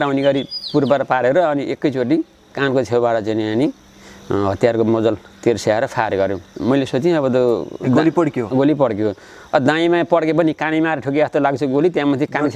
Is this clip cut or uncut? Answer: uncut